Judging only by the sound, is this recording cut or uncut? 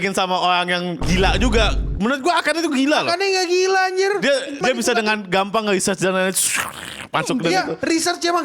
cut